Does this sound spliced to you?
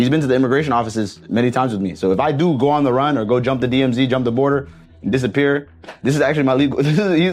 no; 0 cuts

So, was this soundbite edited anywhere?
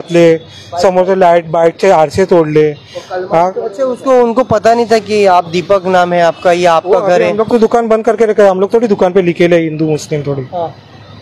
no; 0 cuts

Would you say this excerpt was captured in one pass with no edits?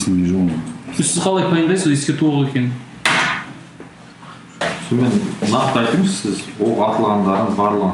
yes; 0 cuts

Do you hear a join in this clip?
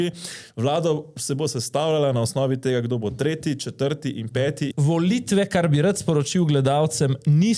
yes; 1 cut; at 4.7 s

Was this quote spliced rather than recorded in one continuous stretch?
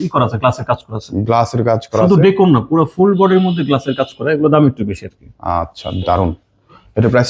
no; 0 cuts

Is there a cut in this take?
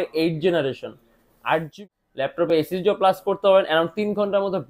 yes; 1 cut; at 1.7 s

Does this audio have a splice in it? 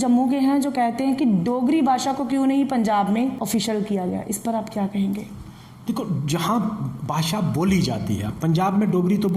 yes; 1 cut; at 3.4 s

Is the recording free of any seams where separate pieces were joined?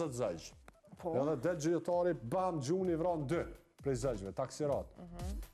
yes; 0 cuts

